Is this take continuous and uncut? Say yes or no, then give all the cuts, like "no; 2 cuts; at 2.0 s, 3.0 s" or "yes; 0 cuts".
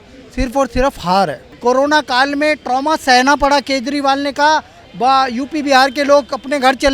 no; 1 cut; at 1.5 s